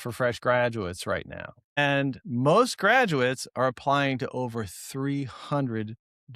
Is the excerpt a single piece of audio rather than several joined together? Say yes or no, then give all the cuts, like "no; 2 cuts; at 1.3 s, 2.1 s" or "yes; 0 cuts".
no; 1 cut; at 1.8 s